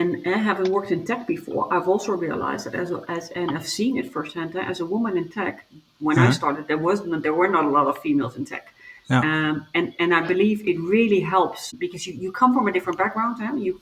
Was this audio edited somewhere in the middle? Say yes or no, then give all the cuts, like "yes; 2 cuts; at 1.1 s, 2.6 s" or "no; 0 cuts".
yes; 1 cut; at 11.7 s